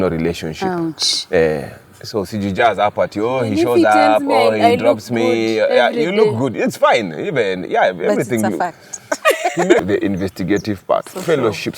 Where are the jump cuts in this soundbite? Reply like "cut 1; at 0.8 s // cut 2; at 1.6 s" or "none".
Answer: cut 1; at 9.8 s